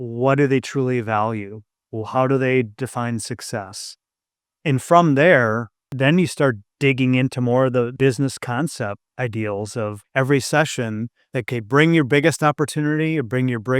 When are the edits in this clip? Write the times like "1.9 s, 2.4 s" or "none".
5.9 s, 6.7 s, 7.9 s, 9.1 s, 10.0 s, 11.5 s